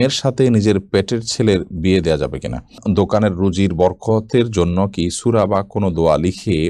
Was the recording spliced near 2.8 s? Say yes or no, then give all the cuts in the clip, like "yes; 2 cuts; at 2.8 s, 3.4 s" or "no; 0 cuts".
yes; 1 cut; at 2.8 s